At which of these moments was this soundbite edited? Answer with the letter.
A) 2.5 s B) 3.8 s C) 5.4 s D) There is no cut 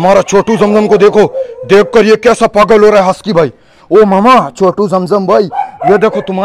D